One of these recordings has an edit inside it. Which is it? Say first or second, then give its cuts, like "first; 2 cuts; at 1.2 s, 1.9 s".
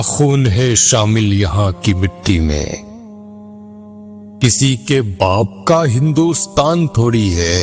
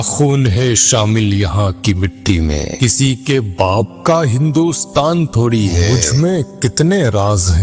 second; 2 cuts; at 2.7 s, 5.9 s